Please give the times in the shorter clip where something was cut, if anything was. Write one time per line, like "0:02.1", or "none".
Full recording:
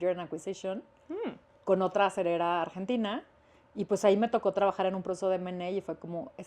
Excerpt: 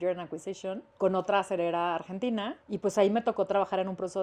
0:00.9
0:02.6